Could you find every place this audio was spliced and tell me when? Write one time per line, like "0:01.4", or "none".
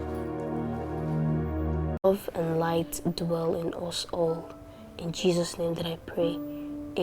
0:02.0